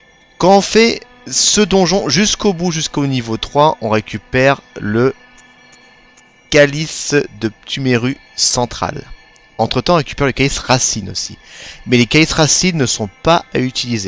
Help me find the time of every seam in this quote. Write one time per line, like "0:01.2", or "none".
none